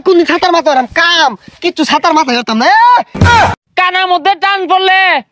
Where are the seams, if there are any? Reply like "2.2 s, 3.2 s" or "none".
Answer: 0.9 s, 3.2 s

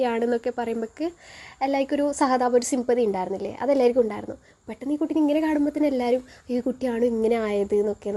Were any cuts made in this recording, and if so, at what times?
none

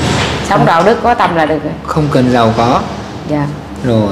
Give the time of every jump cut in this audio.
none

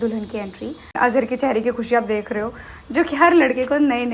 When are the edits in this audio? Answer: 0.9 s

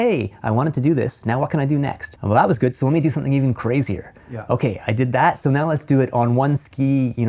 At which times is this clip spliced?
2.1 s

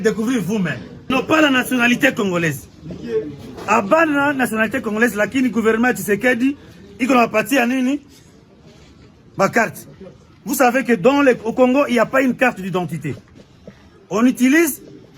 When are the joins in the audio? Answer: 1.1 s

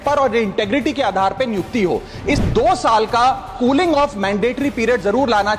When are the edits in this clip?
2.4 s

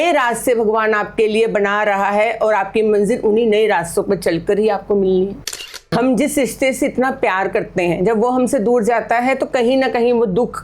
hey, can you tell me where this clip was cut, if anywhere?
5.7 s

